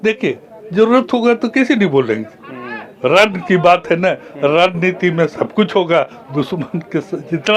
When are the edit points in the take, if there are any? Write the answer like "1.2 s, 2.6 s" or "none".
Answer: none